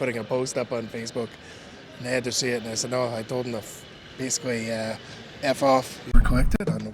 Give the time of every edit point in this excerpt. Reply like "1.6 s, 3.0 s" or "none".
6.0 s